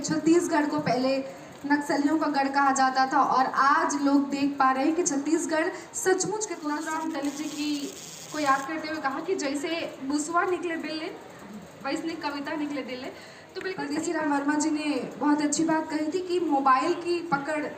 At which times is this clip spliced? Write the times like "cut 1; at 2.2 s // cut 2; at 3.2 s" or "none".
cut 1; at 6.7 s // cut 2; at 13.8 s